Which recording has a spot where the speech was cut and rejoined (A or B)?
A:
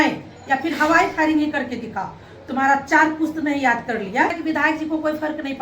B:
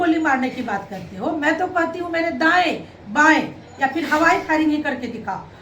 A